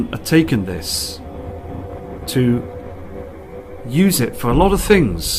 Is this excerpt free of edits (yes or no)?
yes